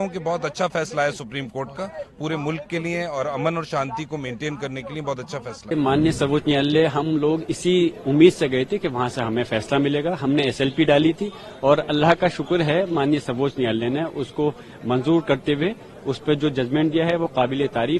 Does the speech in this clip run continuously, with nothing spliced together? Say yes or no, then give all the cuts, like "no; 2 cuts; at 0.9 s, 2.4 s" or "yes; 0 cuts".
yes; 0 cuts